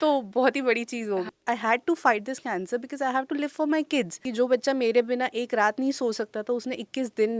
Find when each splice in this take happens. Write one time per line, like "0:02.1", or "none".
0:01.3
0:04.2